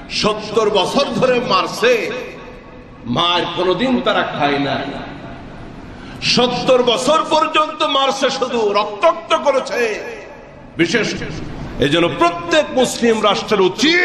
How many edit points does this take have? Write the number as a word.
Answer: one